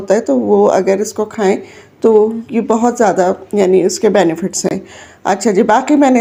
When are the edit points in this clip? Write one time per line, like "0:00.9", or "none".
none